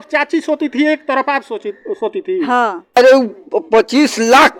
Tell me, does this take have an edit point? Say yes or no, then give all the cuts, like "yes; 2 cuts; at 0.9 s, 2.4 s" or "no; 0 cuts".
yes; 1 cut; at 3.0 s